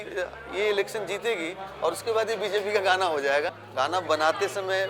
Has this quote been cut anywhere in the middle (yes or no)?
yes